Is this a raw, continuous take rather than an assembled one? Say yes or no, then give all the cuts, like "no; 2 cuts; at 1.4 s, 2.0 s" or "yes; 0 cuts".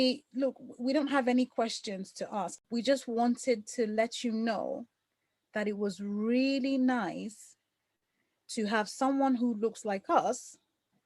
no; 1 cut; at 2.5 s